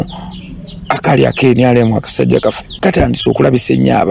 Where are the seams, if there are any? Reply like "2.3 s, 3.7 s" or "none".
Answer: 2.7 s

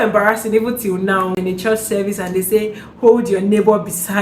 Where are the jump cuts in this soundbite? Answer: 1.3 s

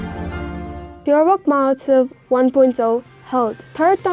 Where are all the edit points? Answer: 1.0 s

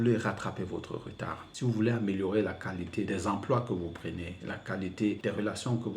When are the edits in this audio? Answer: 1.4 s, 3.1 s, 5.2 s

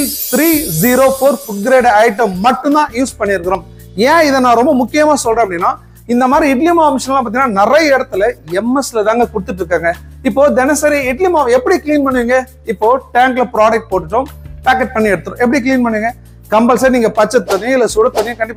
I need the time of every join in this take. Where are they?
none

